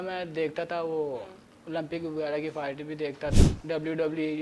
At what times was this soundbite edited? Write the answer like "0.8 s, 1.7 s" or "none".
3.4 s